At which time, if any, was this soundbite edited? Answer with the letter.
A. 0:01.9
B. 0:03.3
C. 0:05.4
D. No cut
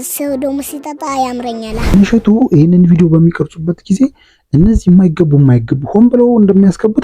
A